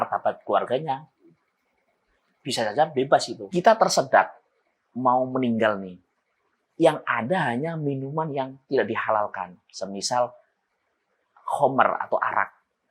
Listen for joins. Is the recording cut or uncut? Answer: cut